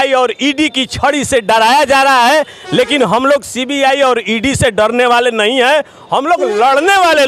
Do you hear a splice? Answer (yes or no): no